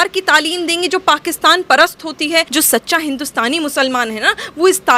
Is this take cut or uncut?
cut